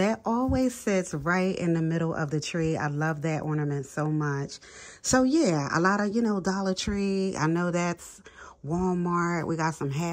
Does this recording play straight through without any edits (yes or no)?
yes